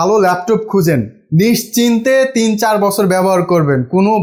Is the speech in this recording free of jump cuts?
yes; 0 cuts

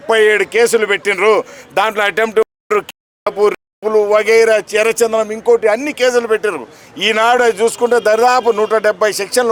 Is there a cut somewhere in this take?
no; 0 cuts

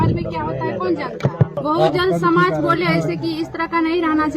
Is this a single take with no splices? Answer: no; 1 cut; at 1.6 s

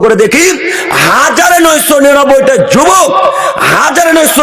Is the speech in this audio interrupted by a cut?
no; 0 cuts

